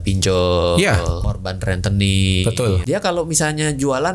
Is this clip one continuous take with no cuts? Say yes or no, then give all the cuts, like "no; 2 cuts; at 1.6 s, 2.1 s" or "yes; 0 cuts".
no; 2 cuts; at 1.2 s, 2.8 s